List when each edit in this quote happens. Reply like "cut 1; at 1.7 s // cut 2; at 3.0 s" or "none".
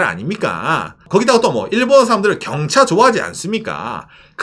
cut 1; at 1.0 s